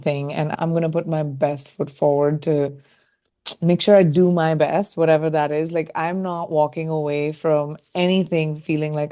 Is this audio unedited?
yes; 0 cuts

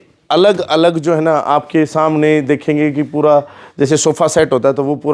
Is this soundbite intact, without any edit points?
yes; 0 cuts

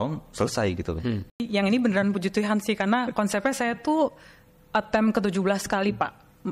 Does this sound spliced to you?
yes; 1 cut; at 1.4 s

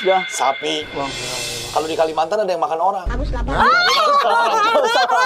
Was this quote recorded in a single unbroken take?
yes; 0 cuts

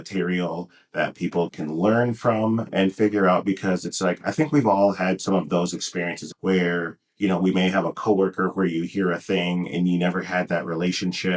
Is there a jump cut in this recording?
yes; 3 cuts; at 1.5 s, 2.7 s, 6.2 s

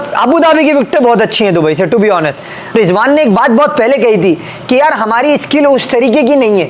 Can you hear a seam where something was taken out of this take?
yes; 1 cut; at 2.7 s

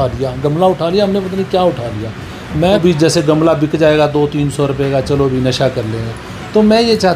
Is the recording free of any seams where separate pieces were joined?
no; 1 cut; at 2.8 s

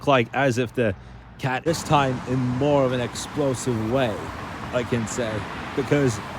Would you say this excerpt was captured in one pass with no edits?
no; 1 cut; at 1.6 s

